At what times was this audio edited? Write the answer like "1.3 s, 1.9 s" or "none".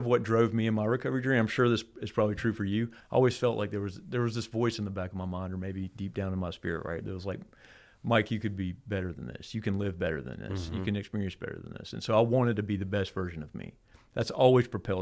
3.0 s